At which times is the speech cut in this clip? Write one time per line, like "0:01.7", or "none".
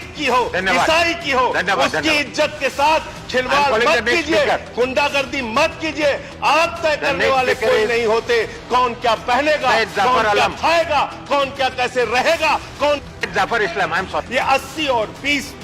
0:14.2